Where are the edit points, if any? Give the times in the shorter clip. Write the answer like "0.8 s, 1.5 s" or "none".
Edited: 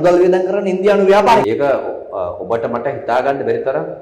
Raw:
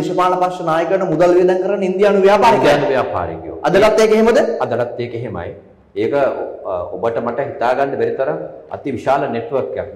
1.4 s